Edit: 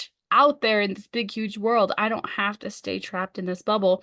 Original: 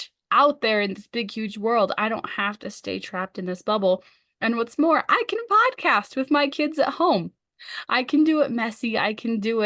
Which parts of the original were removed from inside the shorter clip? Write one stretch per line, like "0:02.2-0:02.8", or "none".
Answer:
none